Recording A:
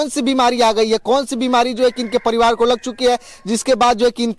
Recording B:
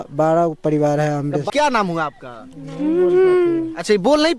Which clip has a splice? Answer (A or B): B